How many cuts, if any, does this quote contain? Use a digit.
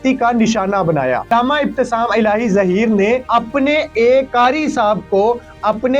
3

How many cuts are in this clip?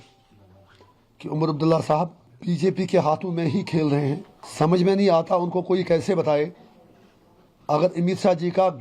2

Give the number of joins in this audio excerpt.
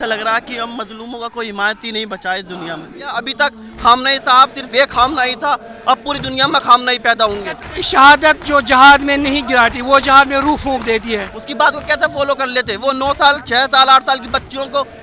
3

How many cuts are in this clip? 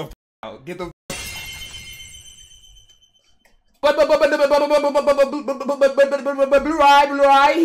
1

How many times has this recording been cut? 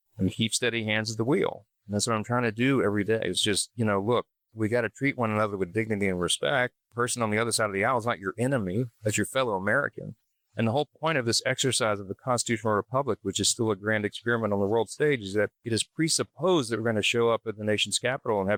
0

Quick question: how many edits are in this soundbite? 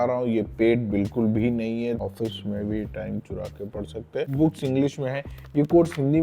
2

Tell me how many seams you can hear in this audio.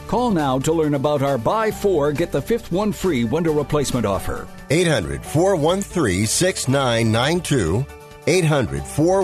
0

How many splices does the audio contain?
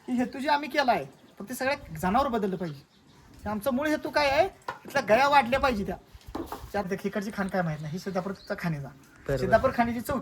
1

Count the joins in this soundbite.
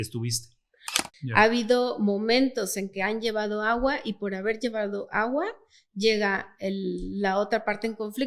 1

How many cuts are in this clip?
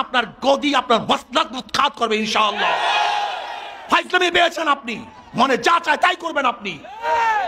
0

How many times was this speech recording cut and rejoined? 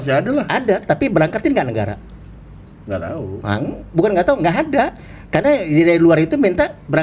0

